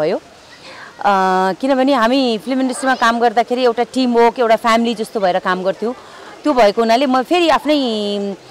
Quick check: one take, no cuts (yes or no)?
yes